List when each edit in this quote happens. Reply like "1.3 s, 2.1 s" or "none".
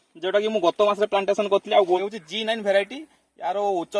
2.0 s